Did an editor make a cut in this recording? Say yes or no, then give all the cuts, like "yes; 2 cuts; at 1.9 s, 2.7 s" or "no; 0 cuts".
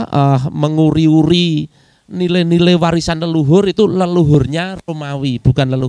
no; 0 cuts